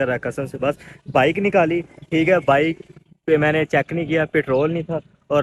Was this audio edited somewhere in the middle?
no; 0 cuts

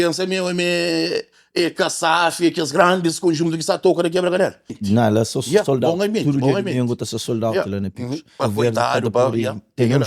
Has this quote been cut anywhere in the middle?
yes; 2 cuts; at 4.8 s, 8.4 s

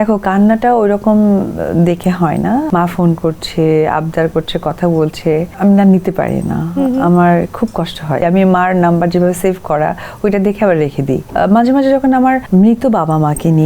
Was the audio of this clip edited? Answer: yes; 5 cuts; at 2.7 s, 5.5 s, 8.2 s, 11.3 s, 12.4 s

